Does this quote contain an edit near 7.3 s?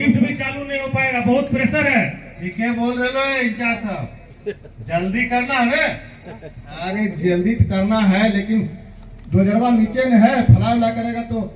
no; 0 cuts

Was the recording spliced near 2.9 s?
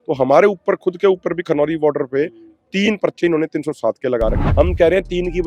no; 1 cut; at 4.4 s

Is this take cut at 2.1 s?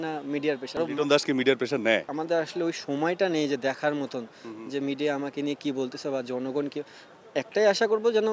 yes; 2 cuts; at 0.8 s, 2.1 s

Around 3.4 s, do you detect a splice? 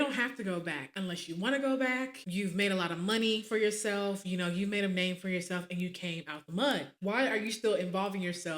no; 0 cuts

